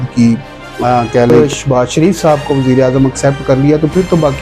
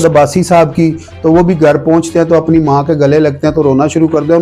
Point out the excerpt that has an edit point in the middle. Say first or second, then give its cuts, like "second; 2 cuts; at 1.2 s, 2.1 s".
first; 1 cut; at 1.3 s